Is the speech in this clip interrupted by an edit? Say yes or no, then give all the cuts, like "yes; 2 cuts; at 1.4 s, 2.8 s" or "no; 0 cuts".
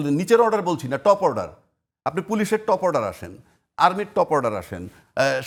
no; 0 cuts